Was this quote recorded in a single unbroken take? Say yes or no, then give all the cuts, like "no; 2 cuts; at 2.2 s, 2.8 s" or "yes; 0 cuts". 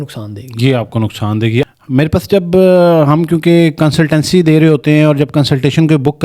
yes; 0 cuts